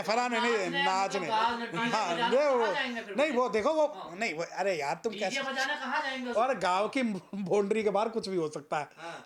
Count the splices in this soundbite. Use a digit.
0